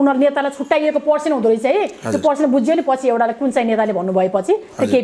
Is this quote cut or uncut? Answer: uncut